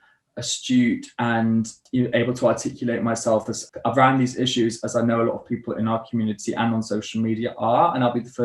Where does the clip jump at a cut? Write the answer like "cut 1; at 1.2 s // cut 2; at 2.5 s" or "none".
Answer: cut 1; at 1.8 s // cut 2; at 3.6 s